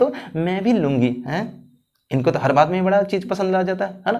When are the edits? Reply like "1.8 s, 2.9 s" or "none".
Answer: none